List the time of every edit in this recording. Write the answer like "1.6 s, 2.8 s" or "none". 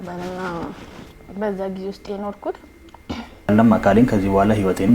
3.5 s